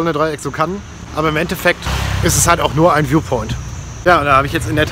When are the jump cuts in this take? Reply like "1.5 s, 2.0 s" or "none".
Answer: 4.0 s